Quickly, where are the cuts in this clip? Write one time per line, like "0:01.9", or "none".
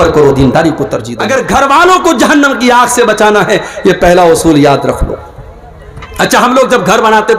0:01.1